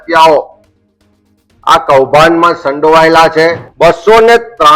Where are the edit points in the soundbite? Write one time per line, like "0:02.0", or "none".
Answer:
0:03.6